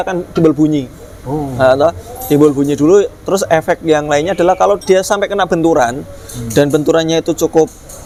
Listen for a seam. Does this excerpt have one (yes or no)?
no